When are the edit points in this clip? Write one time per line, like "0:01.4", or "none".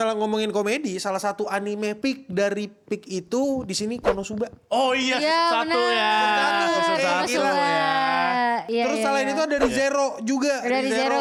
none